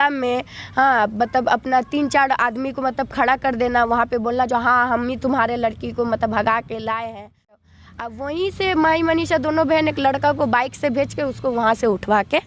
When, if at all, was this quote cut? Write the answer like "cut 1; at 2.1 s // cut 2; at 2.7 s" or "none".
cut 1; at 7.6 s